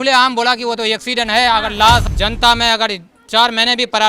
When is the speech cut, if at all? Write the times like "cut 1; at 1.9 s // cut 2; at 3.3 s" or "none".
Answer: cut 1; at 2.0 s